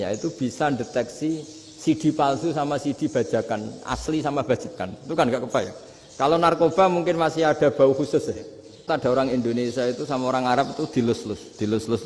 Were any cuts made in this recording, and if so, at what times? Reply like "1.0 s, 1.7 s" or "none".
8.9 s